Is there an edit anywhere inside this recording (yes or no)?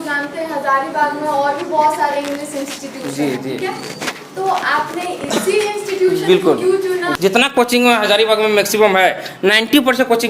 yes